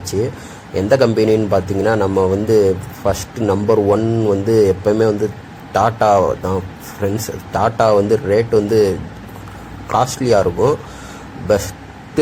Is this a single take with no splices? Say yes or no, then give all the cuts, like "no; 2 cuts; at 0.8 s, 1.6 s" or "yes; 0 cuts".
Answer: yes; 0 cuts